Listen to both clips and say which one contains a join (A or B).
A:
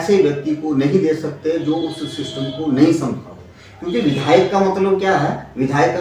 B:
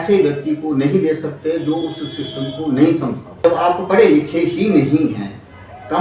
B